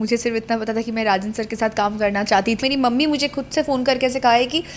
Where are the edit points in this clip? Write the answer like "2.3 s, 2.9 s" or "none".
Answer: 2.6 s